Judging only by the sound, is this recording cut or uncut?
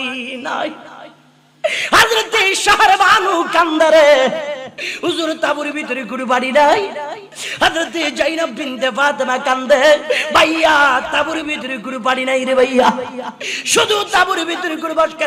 uncut